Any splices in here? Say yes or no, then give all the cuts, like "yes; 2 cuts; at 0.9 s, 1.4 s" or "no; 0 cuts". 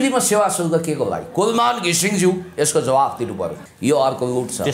yes; 1 cut; at 3.6 s